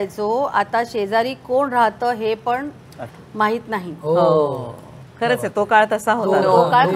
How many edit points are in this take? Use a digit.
0